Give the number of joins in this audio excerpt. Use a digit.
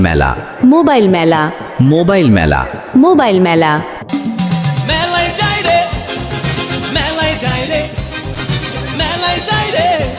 1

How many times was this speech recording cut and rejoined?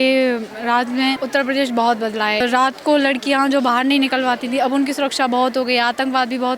2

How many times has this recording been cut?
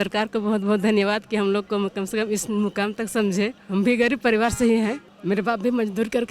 2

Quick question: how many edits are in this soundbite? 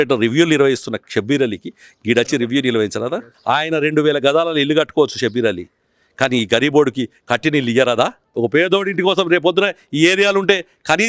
2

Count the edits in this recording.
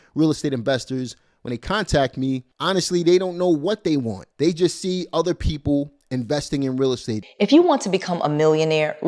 1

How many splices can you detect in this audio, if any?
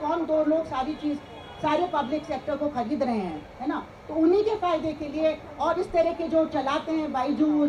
0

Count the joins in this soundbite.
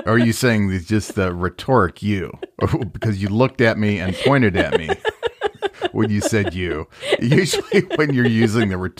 0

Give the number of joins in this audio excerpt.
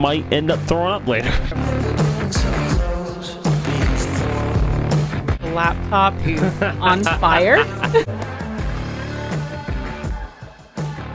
1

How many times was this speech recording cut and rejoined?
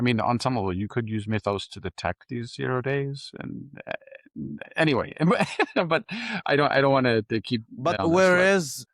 1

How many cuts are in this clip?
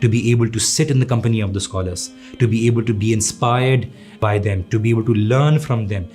1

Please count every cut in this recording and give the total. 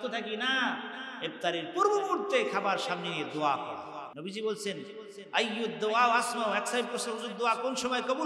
1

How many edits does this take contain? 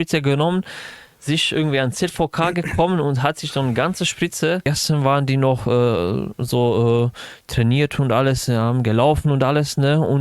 1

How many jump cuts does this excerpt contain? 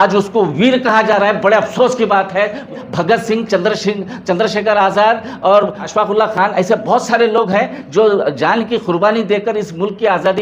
2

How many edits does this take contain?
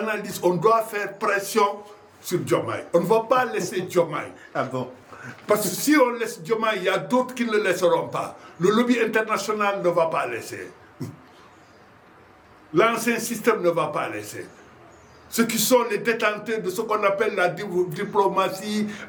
0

